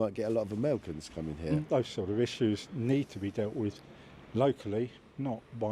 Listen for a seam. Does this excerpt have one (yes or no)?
yes